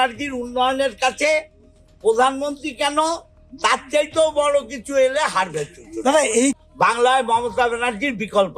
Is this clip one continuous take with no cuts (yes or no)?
no